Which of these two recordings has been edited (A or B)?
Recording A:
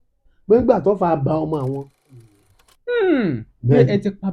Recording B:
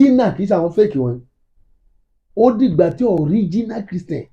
A